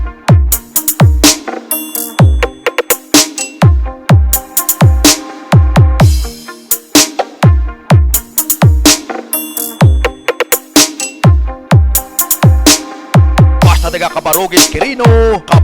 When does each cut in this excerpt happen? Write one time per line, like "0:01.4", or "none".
0:05.9
0:13.6